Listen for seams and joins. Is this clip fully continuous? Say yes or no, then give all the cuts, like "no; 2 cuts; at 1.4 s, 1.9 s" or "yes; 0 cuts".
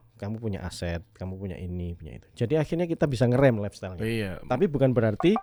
yes; 0 cuts